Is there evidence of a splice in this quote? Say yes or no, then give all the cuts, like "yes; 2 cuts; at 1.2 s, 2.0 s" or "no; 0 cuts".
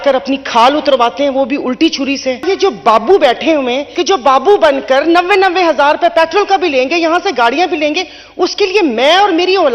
yes; 2 cuts; at 2.4 s, 3.9 s